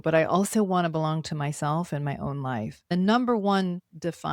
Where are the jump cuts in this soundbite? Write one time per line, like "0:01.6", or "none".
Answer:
0:02.9